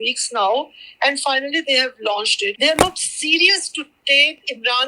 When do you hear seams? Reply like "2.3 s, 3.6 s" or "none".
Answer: 2.5 s

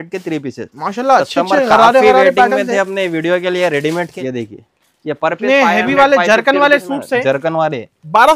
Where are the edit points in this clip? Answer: 4.1 s

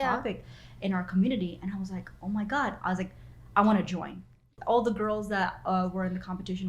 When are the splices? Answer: 4.5 s

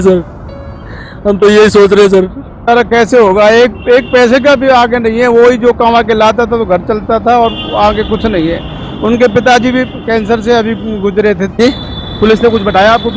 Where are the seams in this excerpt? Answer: 2.7 s, 11.6 s

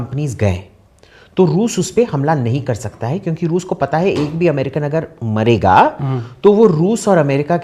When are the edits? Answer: none

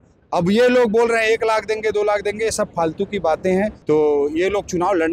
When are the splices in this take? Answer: 3.8 s

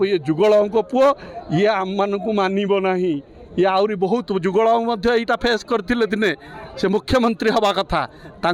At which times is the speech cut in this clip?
none

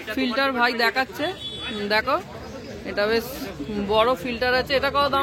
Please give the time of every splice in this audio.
none

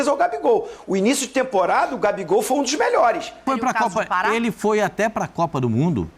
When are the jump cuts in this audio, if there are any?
3.4 s

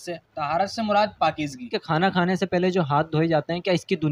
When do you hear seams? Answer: none

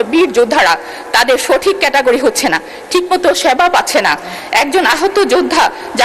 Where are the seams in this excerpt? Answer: none

